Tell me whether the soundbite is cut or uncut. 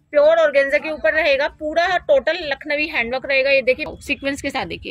cut